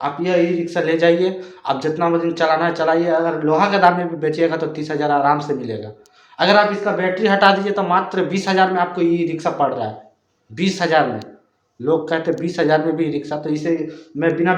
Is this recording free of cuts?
yes; 0 cuts

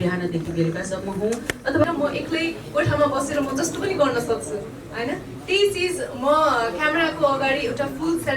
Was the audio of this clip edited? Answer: yes; 1 cut; at 1.8 s

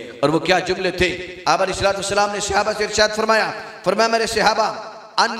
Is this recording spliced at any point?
no; 0 cuts

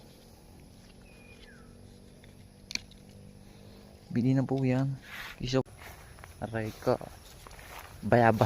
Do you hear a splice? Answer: yes; 1 cut; at 5.6 s

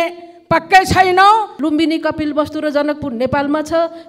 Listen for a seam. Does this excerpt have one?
yes; 1 cut; at 1.5 s

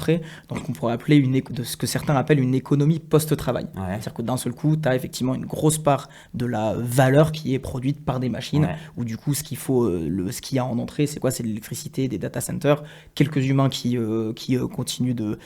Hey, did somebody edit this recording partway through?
no; 0 cuts

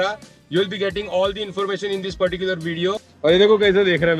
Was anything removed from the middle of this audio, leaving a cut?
yes; 1 cut; at 3.1 s

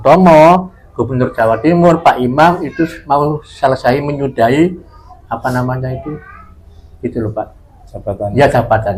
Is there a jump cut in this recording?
no; 0 cuts

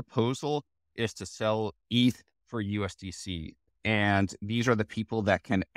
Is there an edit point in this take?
yes; 1 cut; at 3.7 s

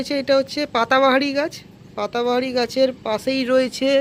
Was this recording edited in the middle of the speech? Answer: no; 0 cuts

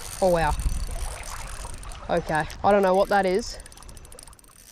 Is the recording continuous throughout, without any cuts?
no; 1 cut; at 2.5 s

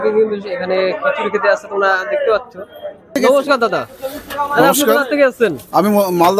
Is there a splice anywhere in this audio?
yes; 1 cut; at 3.0 s

